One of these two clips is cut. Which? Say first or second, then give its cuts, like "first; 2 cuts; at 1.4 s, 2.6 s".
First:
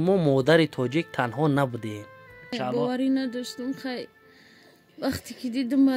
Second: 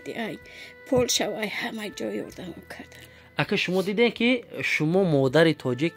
first; 1 cut; at 2.5 s